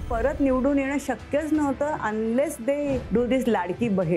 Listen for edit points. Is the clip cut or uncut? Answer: cut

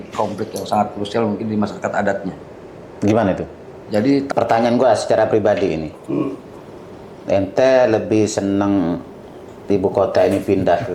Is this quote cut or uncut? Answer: cut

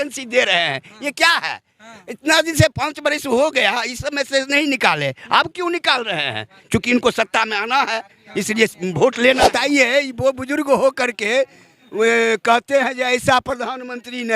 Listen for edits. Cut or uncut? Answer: cut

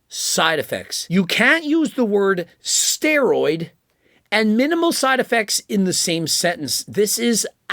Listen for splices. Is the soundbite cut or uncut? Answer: cut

